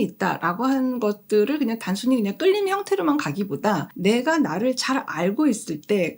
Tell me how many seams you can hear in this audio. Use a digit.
1